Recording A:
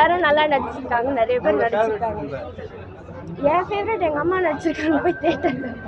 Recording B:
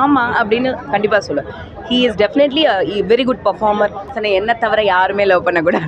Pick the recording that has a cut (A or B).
B